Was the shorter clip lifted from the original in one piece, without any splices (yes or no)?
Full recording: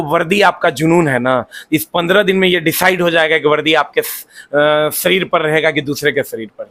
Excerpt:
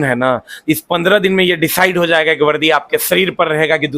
no